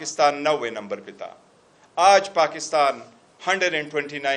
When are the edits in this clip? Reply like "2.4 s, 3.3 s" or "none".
none